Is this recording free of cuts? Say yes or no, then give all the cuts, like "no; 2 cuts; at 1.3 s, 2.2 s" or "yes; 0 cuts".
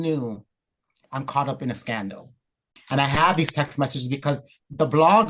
no; 1 cut; at 2.7 s